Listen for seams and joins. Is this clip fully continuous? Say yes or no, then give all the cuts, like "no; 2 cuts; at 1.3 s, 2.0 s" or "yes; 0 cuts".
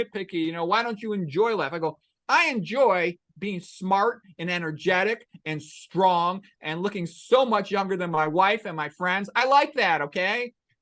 yes; 0 cuts